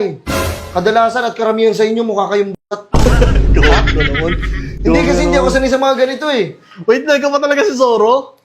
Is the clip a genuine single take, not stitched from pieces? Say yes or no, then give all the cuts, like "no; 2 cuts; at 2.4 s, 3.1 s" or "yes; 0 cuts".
yes; 0 cuts